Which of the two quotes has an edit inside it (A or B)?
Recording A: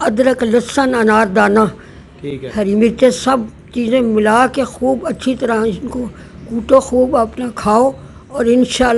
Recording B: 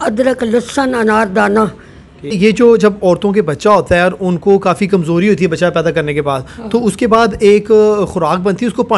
B